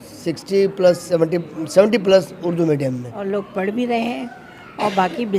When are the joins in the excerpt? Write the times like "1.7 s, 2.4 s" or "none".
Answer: 3.2 s

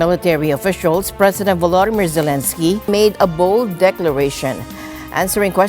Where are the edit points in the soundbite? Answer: 2.9 s

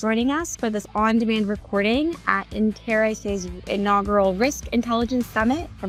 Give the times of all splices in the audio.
none

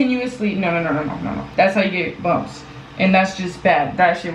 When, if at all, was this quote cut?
1.4 s

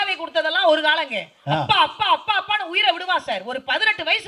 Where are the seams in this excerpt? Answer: none

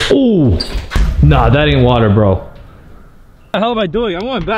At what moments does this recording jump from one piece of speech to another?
3.5 s

